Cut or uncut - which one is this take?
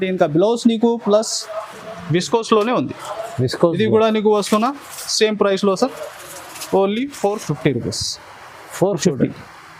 uncut